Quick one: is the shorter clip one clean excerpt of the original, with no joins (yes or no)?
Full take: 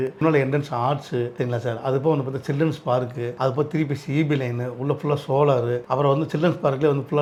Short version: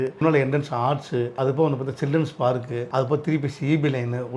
no